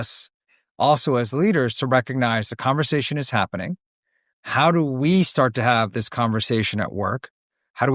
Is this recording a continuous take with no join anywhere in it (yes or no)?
yes